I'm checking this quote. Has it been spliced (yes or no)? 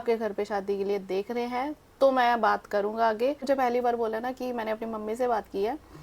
yes